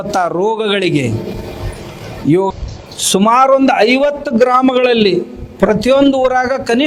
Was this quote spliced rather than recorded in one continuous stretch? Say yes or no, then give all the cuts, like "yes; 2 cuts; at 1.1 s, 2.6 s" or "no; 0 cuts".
yes; 1 cut; at 2.5 s